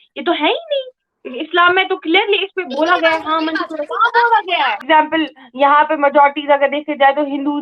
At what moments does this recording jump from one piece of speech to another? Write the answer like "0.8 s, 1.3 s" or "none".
4.8 s

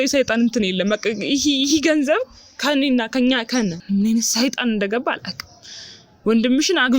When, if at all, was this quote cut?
3.8 s

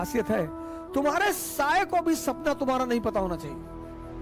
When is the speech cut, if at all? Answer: none

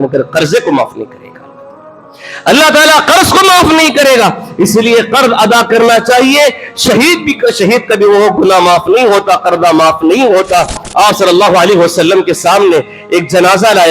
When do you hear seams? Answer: 10.8 s

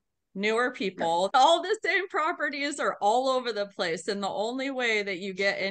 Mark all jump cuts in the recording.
1.3 s

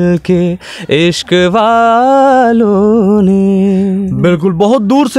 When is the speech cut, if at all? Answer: none

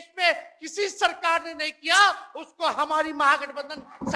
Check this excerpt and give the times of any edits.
none

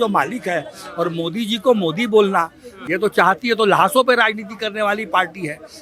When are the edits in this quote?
2.7 s

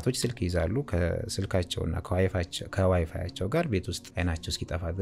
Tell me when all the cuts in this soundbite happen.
4.0 s

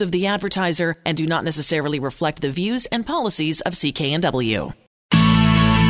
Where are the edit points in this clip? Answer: 5.0 s

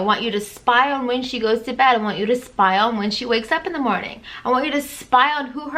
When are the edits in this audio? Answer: none

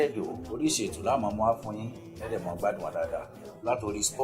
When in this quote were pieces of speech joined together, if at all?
none

